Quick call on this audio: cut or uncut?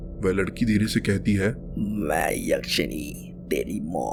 uncut